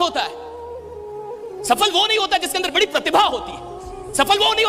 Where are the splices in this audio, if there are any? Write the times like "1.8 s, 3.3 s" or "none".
none

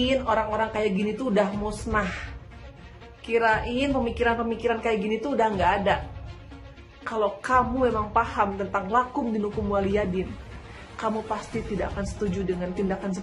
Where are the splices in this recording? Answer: none

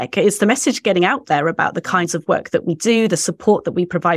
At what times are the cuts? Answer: none

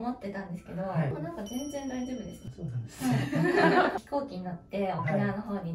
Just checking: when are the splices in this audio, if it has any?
1.1 s, 2.4 s, 4.0 s

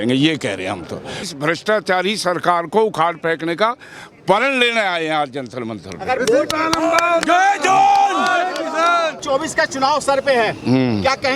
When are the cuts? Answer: 1.2 s, 9.2 s

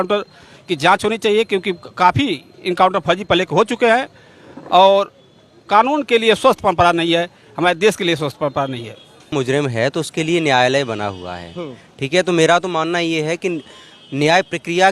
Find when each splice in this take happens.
9.3 s

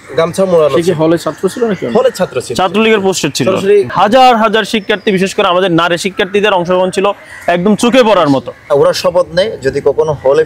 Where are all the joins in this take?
3.9 s, 8.5 s

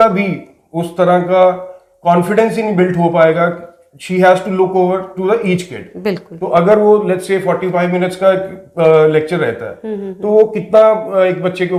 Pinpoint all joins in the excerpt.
none

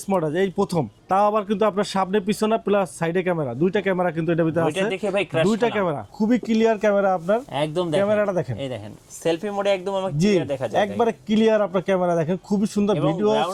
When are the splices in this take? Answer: 1.0 s, 6.1 s

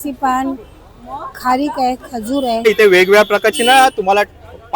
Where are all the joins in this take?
2.6 s

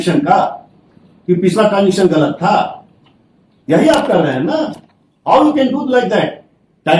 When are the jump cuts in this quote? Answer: none

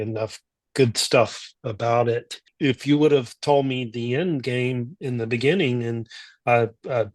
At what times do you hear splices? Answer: 2.4 s

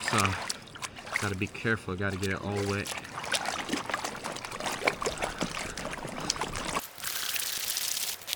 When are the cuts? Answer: none

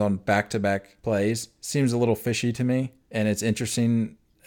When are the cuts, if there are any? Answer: 0.9 s, 1.5 s, 3.0 s

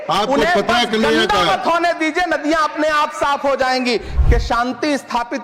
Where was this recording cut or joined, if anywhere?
4.1 s

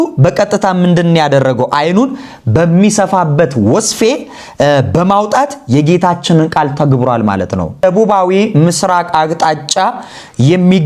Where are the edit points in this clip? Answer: 7.8 s

